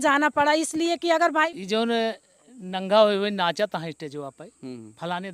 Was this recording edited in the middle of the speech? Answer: yes; 1 cut; at 1.5 s

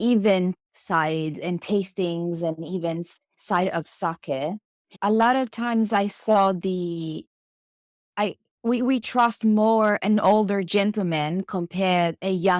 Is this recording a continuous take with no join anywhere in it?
no; 1 cut; at 4.9 s

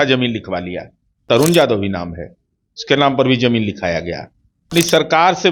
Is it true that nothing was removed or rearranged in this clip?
no; 2 cuts; at 1.2 s, 4.7 s

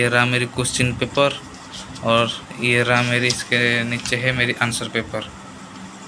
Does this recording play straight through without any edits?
yes; 0 cuts

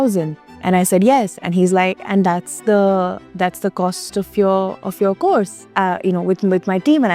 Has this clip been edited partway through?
no; 0 cuts

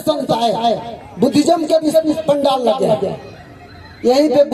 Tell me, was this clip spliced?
no; 0 cuts

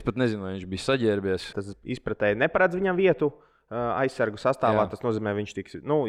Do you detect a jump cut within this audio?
yes; 1 cut; at 1.6 s

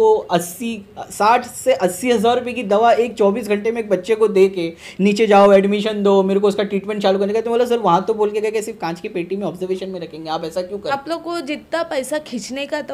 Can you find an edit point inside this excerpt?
yes; 1 cut; at 10.9 s

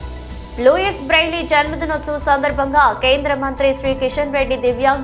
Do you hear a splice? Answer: no; 0 cuts

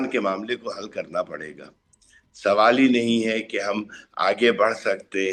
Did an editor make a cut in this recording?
no; 0 cuts

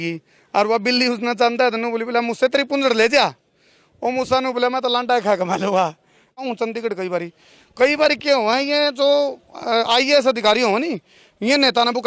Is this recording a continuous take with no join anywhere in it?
no; 1 cut; at 6.4 s

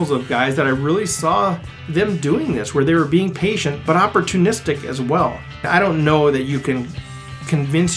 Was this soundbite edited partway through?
yes; 1 cut; at 5.7 s

